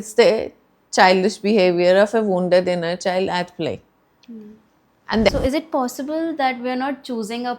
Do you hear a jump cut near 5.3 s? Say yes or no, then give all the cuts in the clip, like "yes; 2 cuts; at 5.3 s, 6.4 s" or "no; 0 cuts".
yes; 1 cut; at 5.3 s